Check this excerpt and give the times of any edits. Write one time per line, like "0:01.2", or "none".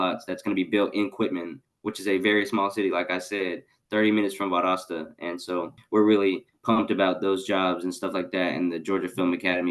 none